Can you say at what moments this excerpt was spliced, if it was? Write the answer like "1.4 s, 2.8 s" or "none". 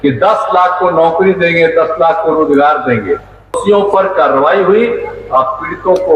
3.6 s